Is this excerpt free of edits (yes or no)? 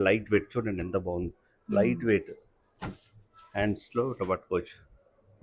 yes